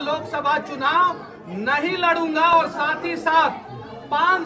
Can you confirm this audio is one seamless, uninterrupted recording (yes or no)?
yes